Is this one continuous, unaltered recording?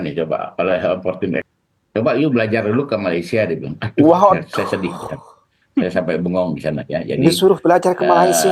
no; 1 cut; at 1.5 s

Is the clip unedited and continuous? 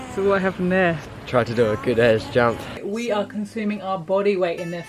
no; 2 cuts; at 1.1 s, 2.9 s

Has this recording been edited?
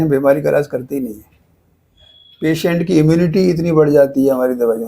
no; 0 cuts

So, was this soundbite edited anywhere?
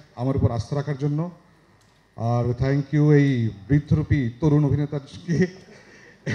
no; 0 cuts

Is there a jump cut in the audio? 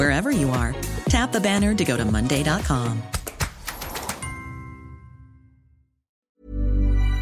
yes; 1 cut; at 6.2 s

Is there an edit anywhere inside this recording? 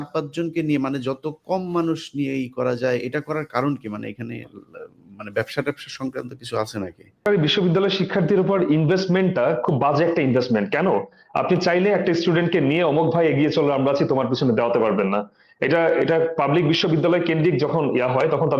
yes; 1 cut; at 7.3 s

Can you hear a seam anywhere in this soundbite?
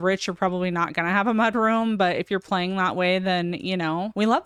no; 0 cuts

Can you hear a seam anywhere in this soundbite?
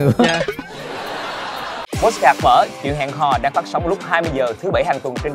yes; 1 cut; at 1.8 s

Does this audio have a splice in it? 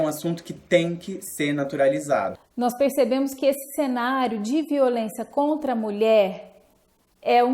yes; 1 cut; at 2.4 s

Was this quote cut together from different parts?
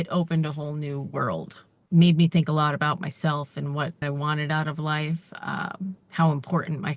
yes; 2 cuts; at 1.8 s, 4.0 s

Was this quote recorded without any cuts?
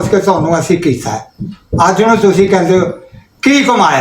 yes; 0 cuts

